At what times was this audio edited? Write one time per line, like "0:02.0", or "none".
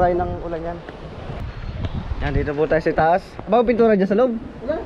0:01.4

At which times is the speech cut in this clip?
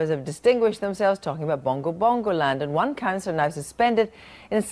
0:03.0

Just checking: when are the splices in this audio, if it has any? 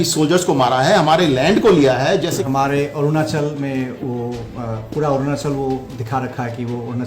0:02.4

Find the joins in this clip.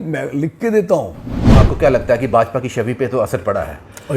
0:01.5

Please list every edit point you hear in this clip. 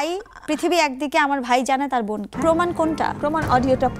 0:02.3

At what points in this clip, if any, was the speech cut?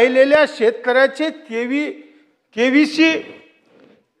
none

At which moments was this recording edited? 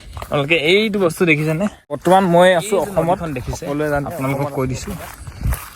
0:02.0
0:04.1

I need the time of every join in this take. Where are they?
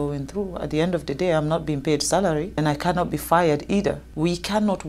0:02.6
0:04.1

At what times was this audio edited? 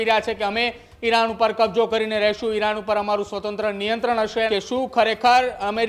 0:04.5

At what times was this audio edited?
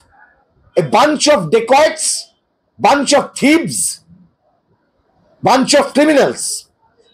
none

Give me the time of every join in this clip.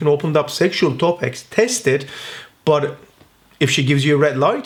none

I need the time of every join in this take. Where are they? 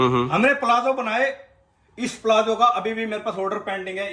none

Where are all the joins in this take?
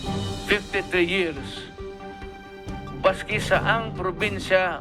none

